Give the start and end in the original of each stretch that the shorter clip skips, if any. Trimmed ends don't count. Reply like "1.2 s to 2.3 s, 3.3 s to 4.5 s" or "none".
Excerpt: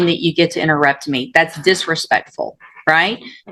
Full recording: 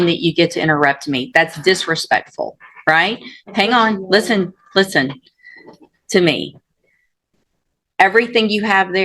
none